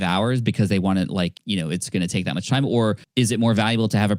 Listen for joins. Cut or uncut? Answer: cut